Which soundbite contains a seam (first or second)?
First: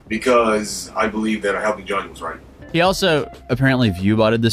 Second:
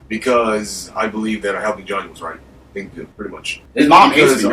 first